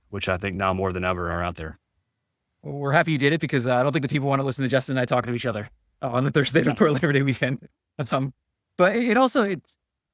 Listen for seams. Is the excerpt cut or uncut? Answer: uncut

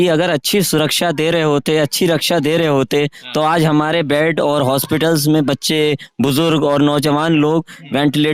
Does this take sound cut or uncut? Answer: uncut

